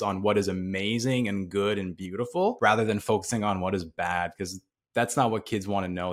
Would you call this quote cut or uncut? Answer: cut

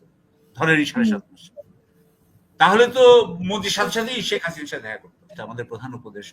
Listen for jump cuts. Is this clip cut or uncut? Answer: cut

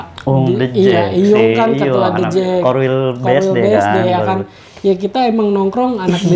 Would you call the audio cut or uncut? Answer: uncut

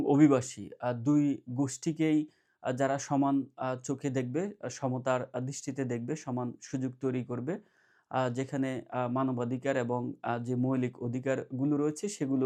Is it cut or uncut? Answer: uncut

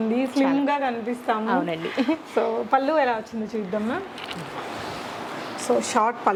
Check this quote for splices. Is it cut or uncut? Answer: uncut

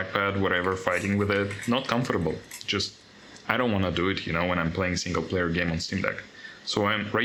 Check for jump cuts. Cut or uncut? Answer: uncut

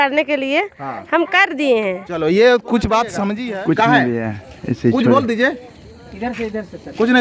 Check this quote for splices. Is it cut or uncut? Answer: cut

